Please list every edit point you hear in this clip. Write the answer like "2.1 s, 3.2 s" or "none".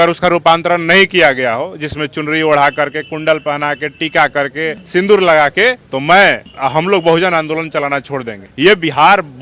none